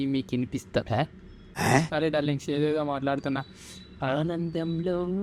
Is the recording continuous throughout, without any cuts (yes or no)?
yes